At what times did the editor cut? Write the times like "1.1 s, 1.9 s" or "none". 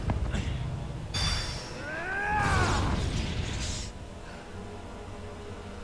none